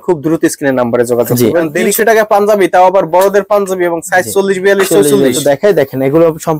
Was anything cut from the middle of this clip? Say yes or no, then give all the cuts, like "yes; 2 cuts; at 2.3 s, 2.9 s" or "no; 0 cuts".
yes; 2 cuts; at 1.8 s, 5.4 s